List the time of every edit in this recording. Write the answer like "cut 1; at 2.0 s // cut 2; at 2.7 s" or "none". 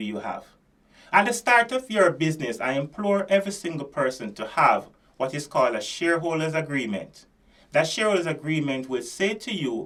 none